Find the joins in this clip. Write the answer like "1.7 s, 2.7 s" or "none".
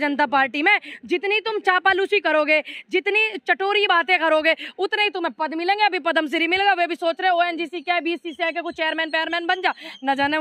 none